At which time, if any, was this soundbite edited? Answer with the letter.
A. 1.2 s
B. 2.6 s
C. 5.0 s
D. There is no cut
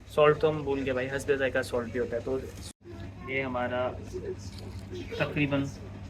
B